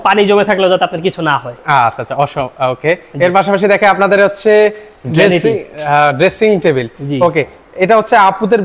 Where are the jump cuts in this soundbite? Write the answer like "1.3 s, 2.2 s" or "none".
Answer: none